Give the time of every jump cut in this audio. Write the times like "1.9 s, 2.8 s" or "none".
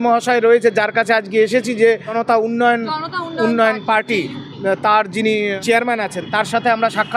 2.2 s, 5.6 s